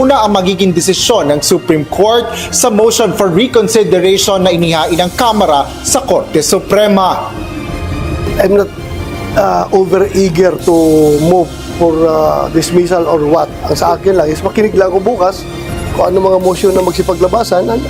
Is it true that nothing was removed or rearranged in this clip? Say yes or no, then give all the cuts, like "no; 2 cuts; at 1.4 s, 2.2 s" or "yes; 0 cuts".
yes; 0 cuts